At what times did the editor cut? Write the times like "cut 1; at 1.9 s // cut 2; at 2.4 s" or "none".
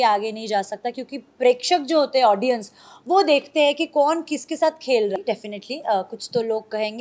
cut 1; at 5.2 s

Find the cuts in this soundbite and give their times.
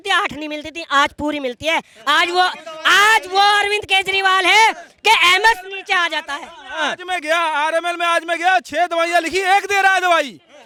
none

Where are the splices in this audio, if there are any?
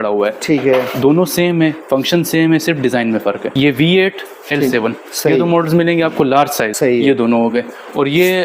cut 1; at 3.5 s // cut 2; at 6.7 s

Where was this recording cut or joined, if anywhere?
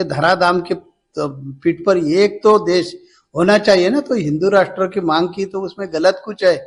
none

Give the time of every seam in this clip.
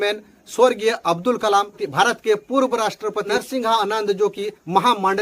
cut 1; at 3.4 s

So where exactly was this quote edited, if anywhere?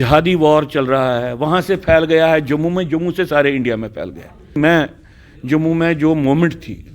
cut 1; at 4.5 s

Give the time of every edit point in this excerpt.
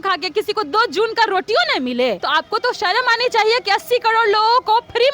cut 1; at 2.2 s

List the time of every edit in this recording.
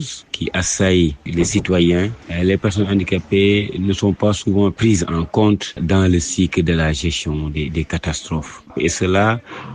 cut 1; at 1.2 s // cut 2; at 2.2 s // cut 3; at 5.8 s // cut 4; at 8.6 s

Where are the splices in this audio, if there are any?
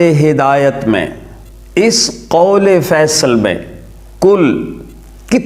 none

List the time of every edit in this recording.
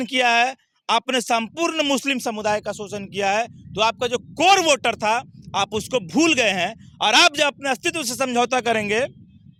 none

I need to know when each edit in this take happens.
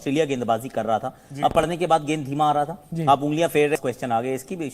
cut 1; at 3.8 s

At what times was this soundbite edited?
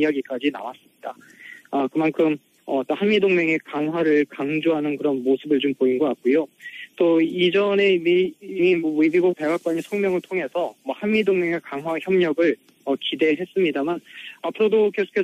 cut 1; at 3.2 s

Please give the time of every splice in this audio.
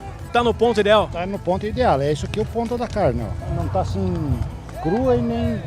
cut 1; at 3.4 s

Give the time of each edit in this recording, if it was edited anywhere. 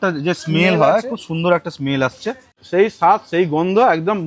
cut 1; at 2.5 s

